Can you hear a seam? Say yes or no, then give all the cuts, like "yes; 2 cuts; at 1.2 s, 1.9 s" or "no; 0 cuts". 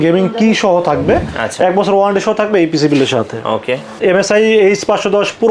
yes; 1 cut; at 4.0 s